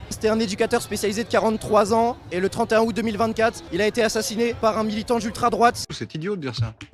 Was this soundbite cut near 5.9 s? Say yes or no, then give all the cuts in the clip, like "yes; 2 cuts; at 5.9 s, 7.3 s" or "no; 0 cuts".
yes; 1 cut; at 5.9 s